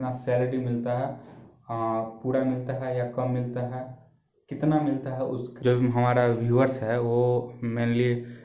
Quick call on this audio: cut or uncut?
cut